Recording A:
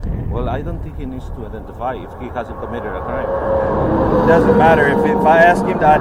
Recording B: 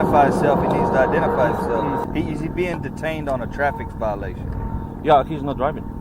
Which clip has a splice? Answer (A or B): B